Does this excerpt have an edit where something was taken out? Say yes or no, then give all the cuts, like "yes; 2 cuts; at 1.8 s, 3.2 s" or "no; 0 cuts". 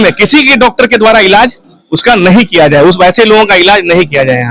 no; 0 cuts